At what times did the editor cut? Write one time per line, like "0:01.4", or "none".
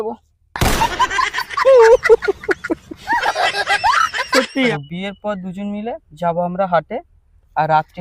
0:04.7